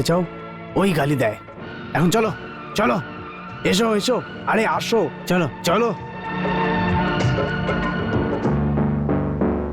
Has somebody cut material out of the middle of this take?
no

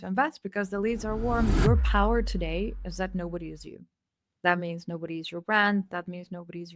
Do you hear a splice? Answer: yes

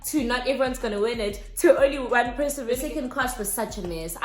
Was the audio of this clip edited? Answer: yes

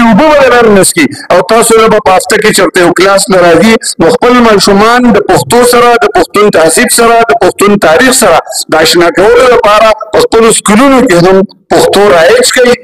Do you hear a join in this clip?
no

